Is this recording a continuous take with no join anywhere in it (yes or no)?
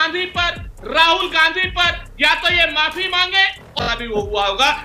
no